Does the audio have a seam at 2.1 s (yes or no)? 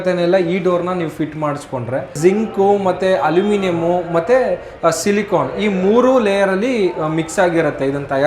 yes